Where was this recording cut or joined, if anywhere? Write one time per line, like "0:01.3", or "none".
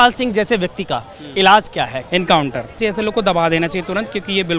0:02.0
0:02.8